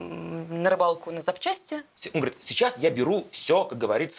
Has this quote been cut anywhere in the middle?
yes; 1 cut; at 1.9 s

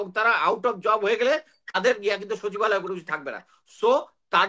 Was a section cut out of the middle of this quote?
no; 0 cuts

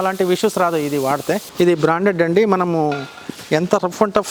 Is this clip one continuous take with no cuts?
no; 1 cut; at 1.5 s

